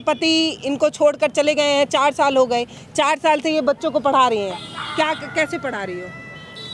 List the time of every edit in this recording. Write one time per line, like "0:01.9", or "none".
none